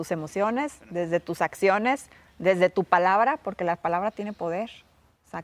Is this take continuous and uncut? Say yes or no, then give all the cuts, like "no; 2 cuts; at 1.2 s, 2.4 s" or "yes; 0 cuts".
yes; 0 cuts